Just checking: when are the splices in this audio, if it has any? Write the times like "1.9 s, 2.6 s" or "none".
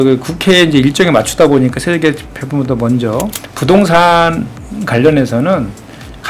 3.3 s

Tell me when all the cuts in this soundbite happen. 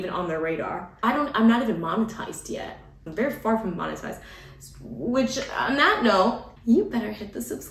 1.0 s, 3.1 s, 6.5 s

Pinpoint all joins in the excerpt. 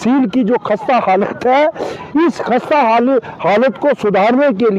none

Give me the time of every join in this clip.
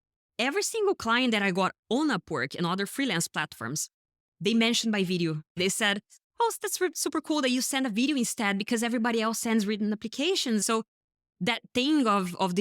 5.6 s, 10.6 s

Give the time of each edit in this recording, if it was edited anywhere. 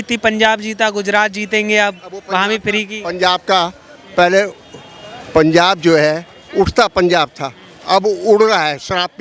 none

